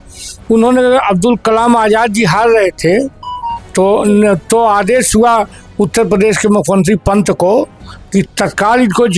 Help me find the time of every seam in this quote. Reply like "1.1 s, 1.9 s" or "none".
none